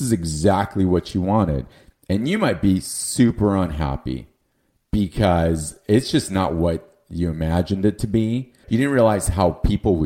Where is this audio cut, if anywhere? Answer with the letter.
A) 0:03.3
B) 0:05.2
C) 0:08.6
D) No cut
C